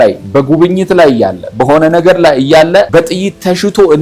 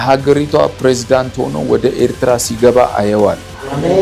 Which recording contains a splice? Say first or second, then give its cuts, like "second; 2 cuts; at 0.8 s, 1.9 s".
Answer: first; 1 cut; at 2.9 s